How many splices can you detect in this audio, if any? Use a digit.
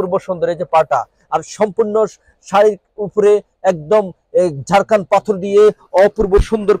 0